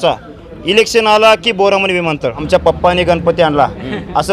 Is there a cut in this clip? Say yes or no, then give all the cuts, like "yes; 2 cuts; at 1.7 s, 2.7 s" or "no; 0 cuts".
yes; 1 cut; at 2.4 s